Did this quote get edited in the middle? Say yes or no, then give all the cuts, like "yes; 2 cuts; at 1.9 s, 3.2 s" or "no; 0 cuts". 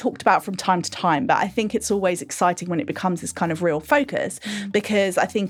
no; 0 cuts